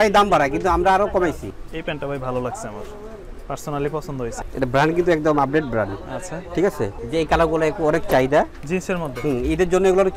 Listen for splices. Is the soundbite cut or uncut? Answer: cut